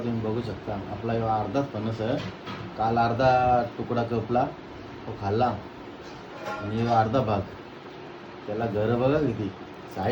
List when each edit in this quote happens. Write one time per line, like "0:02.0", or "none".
none